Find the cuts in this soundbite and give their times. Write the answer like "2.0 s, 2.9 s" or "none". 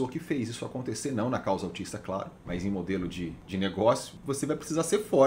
3.4 s, 4.2 s